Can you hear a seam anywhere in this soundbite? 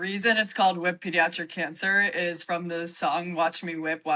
no; 0 cuts

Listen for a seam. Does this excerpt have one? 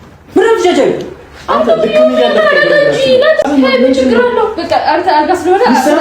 yes; 1 cut; at 3.5 s

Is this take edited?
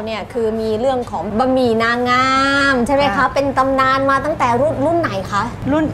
no; 0 cuts

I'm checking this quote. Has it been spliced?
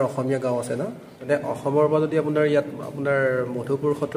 yes; 1 cut; at 1.2 s

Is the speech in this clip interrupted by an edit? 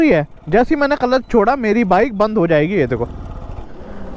no; 0 cuts

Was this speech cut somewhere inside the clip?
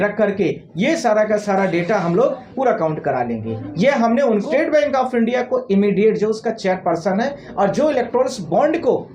yes; 1 cut; at 4.5 s

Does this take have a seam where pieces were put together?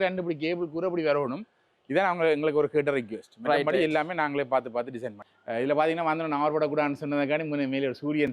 no; 0 cuts

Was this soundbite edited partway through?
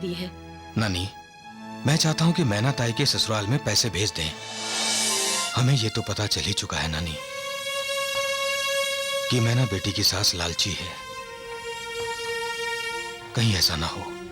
yes; 1 cut; at 5.5 s

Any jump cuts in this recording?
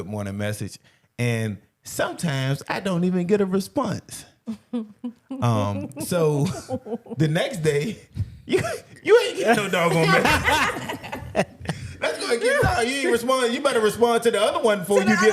no; 0 cuts

